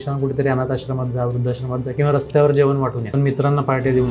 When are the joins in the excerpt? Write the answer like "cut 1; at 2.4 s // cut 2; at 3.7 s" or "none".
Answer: cut 1; at 3.0 s